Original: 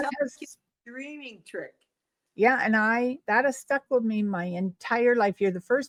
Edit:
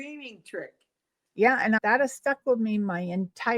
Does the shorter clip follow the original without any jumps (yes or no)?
no